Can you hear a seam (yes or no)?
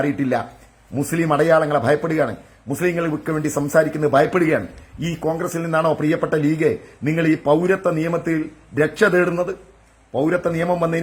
no